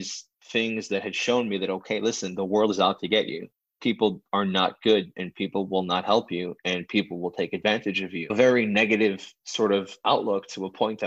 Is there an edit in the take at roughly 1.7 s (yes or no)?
no